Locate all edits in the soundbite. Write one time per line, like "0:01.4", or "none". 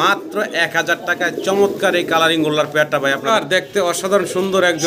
0:03.3